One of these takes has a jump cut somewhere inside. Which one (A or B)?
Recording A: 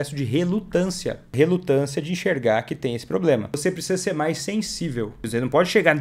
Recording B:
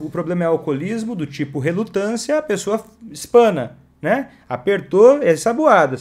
A